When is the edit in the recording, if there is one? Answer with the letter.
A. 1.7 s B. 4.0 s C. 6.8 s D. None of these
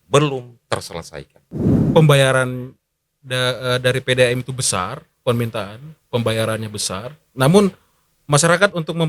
A